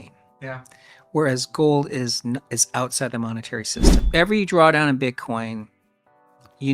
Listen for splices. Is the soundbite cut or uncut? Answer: cut